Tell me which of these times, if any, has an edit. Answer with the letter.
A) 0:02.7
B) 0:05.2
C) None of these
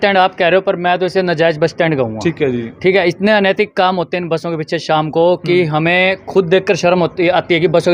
C